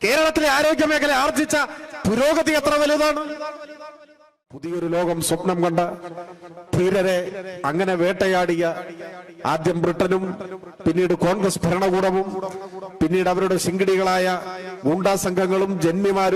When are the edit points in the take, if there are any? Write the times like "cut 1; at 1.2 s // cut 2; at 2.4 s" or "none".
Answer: cut 1; at 4.6 s